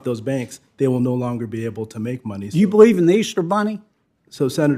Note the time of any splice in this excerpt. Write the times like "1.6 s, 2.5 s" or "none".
none